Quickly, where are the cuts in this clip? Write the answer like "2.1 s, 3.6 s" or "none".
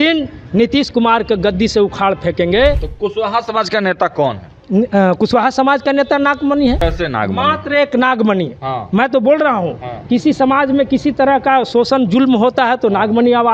2.9 s, 6.8 s

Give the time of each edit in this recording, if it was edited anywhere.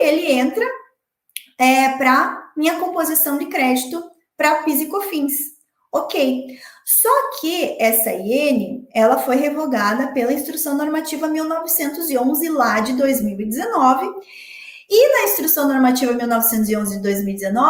none

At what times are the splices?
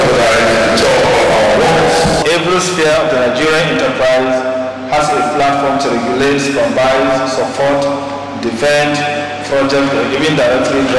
2.2 s

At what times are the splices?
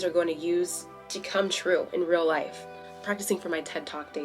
2.8 s

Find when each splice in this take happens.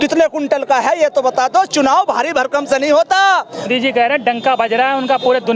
3.7 s

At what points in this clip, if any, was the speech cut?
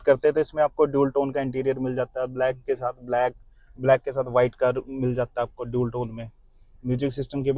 none

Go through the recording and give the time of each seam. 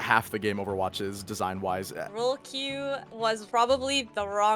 2.1 s, 3.2 s

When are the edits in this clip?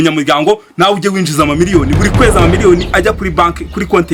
none

